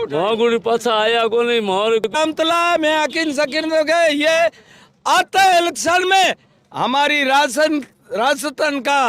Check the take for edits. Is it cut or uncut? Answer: cut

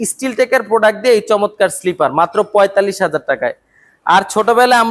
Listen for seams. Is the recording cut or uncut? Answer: uncut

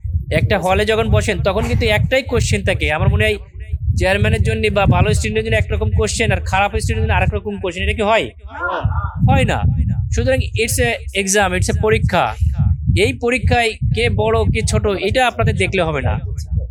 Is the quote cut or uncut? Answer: uncut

